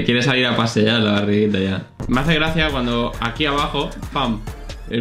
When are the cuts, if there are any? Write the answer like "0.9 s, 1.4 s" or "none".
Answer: 2.0 s